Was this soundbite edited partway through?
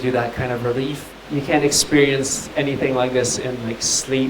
yes; 1 cut; at 1.1 s

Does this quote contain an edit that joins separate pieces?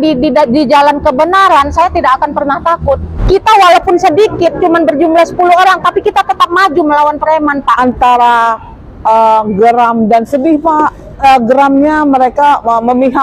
yes; 3 cuts; at 3.1 s, 7.8 s, 11.1 s

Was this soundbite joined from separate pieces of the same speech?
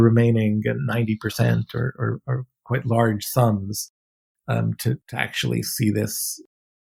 no; 0 cuts

